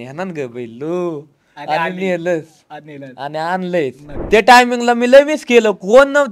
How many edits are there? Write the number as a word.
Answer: one